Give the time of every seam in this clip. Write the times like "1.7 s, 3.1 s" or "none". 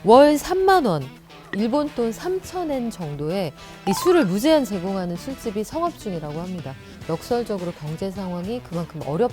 6.9 s